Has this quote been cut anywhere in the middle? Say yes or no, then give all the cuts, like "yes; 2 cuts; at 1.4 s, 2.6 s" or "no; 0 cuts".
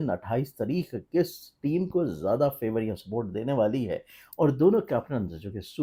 no; 0 cuts